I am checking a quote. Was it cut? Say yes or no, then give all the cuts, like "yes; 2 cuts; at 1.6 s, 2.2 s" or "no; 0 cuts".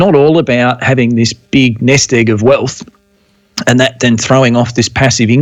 no; 0 cuts